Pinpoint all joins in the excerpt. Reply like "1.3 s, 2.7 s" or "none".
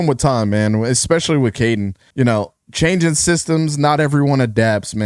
2.0 s

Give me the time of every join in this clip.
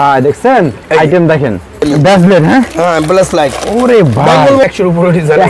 1.8 s, 4.6 s

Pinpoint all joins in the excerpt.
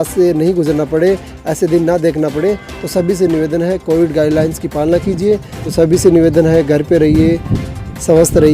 5.7 s

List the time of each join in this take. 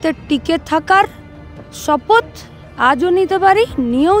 none

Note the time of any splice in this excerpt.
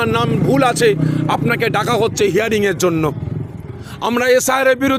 none

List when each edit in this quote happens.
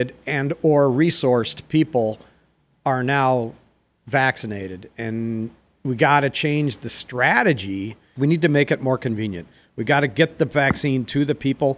8.0 s

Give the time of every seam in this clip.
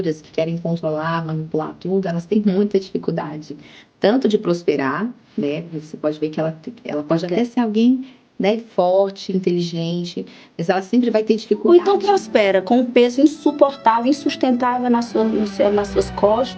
none

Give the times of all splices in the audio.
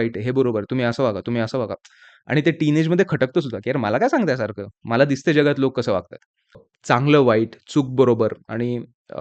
6.6 s

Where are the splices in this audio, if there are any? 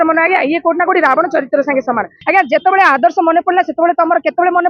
2.1 s

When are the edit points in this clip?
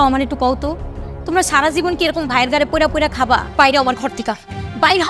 3.5 s

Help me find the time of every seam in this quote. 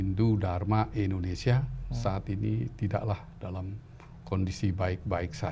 none

